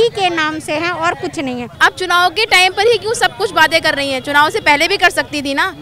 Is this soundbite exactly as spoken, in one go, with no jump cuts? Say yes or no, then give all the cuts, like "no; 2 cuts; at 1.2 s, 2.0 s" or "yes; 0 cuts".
no; 1 cut; at 1.7 s